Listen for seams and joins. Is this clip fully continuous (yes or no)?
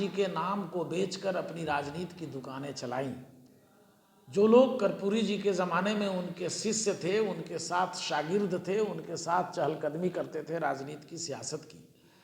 yes